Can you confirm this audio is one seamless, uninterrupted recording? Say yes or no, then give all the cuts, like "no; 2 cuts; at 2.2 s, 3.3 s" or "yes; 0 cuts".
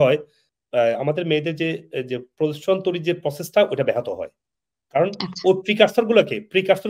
yes; 0 cuts